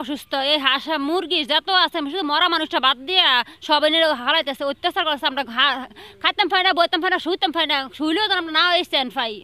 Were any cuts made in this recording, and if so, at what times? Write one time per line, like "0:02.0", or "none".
none